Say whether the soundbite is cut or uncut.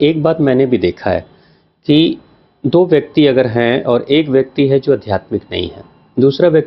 uncut